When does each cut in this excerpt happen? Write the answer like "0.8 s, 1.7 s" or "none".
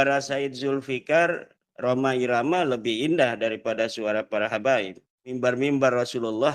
5.4 s

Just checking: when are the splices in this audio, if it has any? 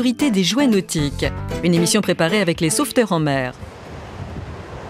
4.0 s

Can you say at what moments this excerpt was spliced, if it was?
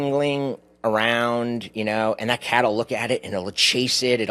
none

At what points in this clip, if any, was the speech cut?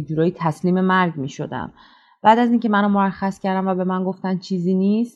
none

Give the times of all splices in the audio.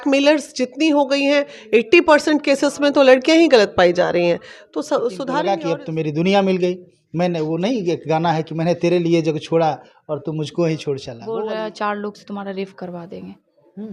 5.2 s, 11.1 s

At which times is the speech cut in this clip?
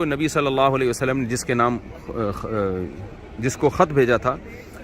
none

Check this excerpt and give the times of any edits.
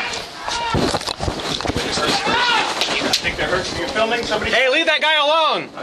none

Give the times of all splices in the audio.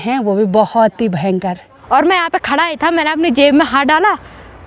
1.7 s

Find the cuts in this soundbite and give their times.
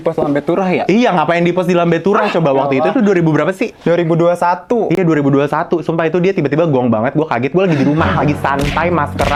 none

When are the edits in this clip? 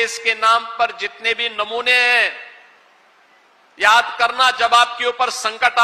none

